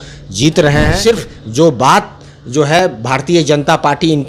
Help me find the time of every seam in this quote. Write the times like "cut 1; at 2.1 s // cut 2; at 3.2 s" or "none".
cut 1; at 0.9 s